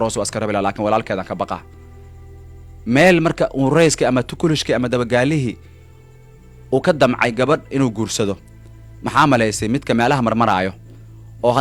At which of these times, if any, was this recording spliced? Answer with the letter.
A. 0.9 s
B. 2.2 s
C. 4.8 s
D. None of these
D